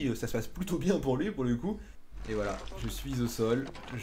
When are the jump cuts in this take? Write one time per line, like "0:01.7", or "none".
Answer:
0:01.9